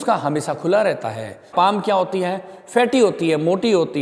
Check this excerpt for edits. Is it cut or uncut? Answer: cut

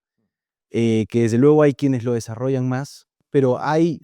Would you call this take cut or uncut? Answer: cut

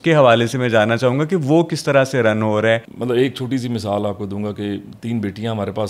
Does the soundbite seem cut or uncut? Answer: cut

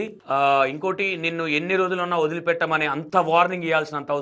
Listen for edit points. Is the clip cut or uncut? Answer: cut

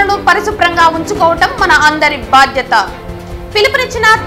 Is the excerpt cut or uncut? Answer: uncut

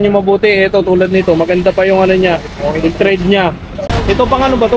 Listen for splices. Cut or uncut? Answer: cut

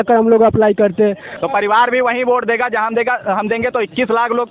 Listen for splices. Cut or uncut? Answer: cut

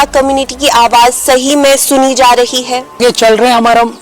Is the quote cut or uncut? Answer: cut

